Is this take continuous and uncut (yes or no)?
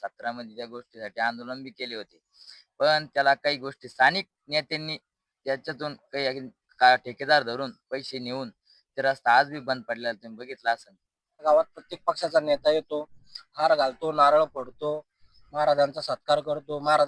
no